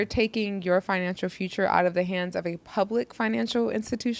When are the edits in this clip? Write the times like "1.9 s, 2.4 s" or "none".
none